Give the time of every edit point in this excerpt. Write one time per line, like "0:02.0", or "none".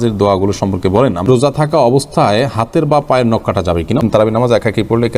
0:01.3
0:04.1